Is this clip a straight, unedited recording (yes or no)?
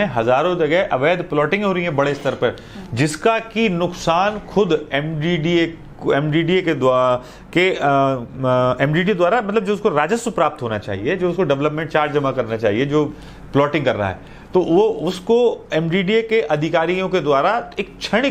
yes